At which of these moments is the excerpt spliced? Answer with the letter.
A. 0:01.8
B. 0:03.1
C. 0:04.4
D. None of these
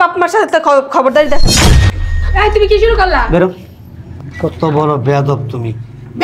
A